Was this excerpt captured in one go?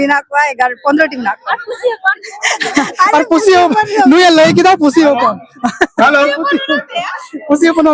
yes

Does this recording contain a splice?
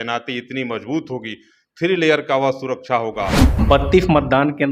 yes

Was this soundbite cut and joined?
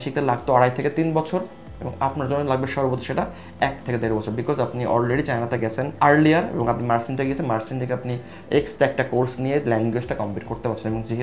no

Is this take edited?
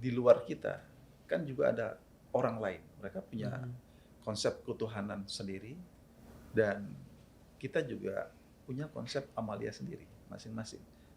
yes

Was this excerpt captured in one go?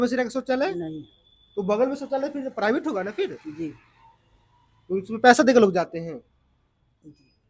yes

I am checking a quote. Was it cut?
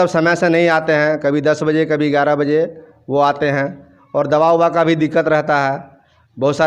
no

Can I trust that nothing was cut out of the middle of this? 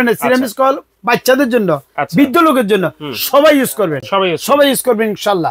yes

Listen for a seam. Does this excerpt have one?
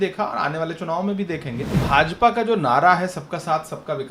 yes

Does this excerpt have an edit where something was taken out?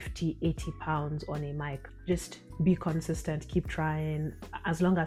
no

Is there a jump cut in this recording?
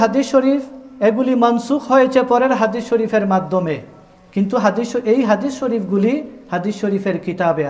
no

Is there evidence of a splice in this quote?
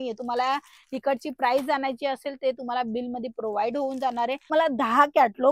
yes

